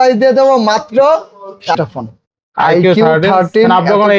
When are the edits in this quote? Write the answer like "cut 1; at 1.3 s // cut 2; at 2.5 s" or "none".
cut 1; at 1.7 s